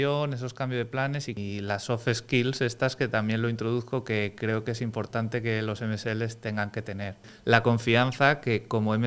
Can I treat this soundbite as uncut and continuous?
no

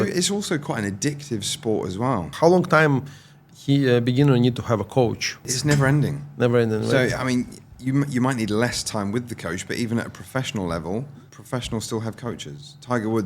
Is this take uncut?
no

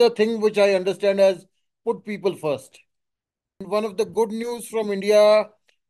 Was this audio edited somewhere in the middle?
yes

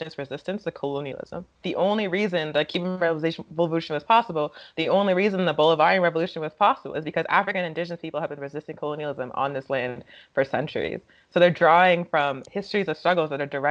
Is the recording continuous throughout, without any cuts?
no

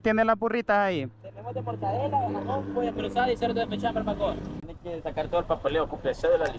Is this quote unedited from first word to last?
no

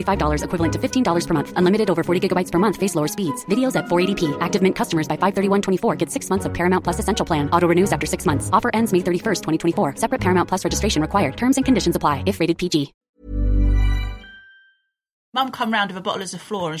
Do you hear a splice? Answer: yes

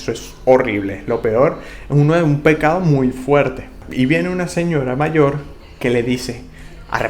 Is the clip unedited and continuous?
yes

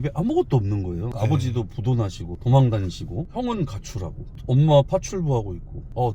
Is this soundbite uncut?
no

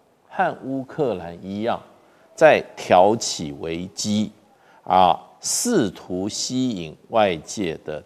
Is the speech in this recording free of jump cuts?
yes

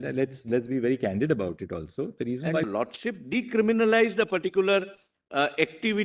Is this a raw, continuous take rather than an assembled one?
no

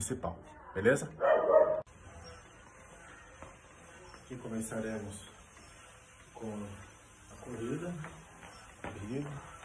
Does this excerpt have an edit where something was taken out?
no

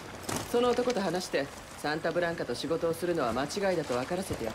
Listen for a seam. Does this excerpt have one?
no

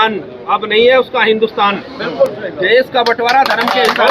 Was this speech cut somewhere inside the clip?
no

